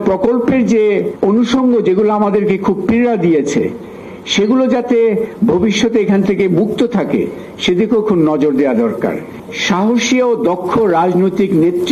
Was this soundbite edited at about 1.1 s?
yes; 2 cuts; at 1.1 s, 9.4 s

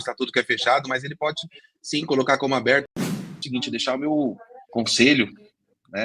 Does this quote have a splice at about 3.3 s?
yes; 1 cut; at 3.3 s

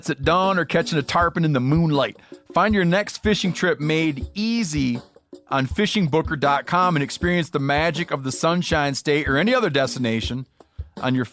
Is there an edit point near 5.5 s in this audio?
no; 0 cuts

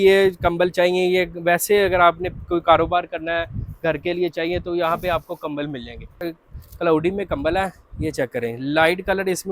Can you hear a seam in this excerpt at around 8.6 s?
no; 1 cut; at 6.2 s

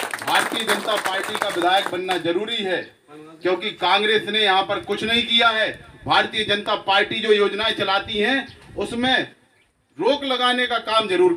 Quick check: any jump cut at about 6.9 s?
no; 0 cuts

